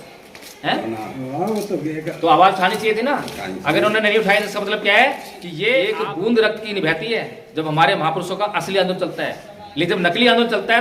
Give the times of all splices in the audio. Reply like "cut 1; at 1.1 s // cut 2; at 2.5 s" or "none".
cut 1; at 5.9 s